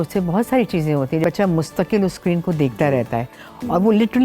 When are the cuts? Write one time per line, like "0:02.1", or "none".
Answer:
0:01.2